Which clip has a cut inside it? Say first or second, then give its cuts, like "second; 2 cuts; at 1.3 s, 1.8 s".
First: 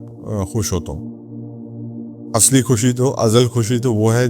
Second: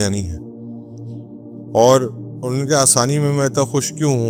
first; 2 cuts; at 0.8 s, 2.3 s